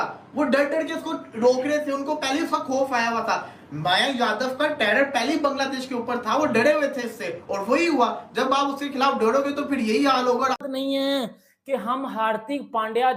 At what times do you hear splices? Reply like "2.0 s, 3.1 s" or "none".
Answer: none